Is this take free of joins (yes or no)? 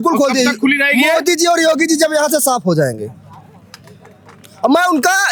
yes